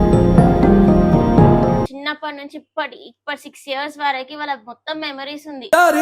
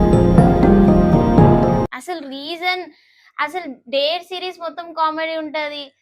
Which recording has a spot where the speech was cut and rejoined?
first; 1 cut; at 1.9 s

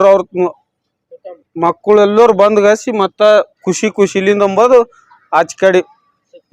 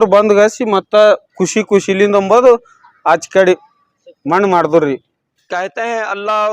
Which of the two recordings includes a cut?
second; 1 cut; at 5.4 s

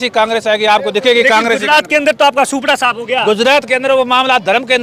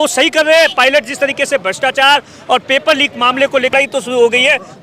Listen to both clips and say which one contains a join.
second; 1 cut; at 3.7 s

